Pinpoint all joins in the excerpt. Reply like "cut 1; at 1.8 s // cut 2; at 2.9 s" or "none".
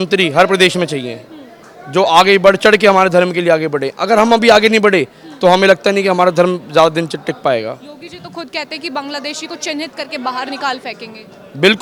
none